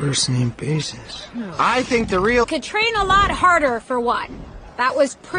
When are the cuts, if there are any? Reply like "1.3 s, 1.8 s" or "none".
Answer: none